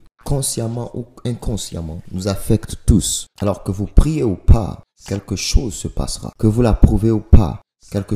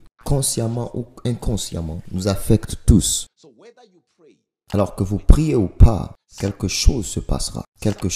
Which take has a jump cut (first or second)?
first